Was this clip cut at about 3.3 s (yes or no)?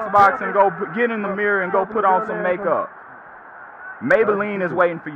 no